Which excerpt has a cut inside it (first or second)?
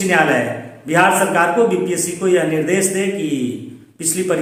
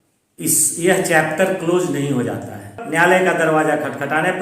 second